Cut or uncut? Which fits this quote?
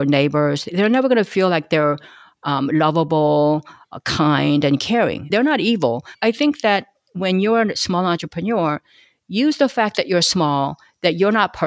cut